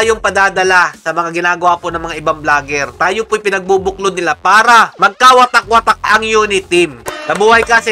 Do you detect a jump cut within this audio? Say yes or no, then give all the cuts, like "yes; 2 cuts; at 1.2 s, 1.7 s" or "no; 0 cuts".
yes; 2 cuts; at 6.0 s, 7.0 s